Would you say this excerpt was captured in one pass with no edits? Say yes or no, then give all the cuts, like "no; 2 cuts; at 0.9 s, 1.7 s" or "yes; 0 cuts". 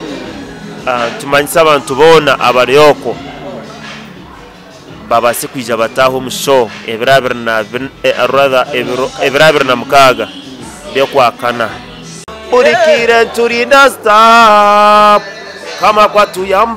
no; 1 cut; at 12.3 s